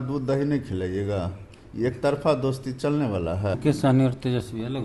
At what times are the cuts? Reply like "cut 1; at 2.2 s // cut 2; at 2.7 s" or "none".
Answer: cut 1; at 3.6 s